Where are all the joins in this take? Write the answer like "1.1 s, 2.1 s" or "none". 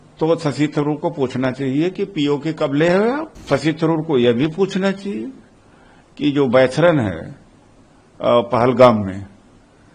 3.4 s